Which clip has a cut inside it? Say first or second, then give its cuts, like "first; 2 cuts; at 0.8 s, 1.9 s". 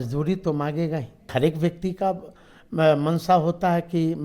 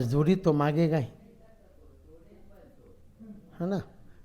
first; 1 cut; at 1.3 s